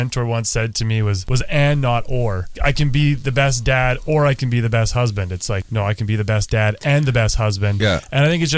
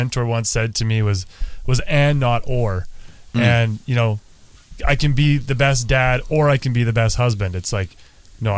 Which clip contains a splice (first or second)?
first